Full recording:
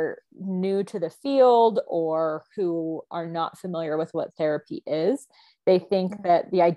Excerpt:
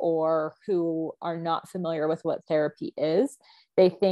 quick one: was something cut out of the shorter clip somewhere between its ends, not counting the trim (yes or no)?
no